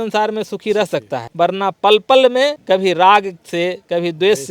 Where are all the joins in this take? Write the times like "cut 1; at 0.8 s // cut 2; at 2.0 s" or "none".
cut 1; at 1.2 s // cut 2; at 2.6 s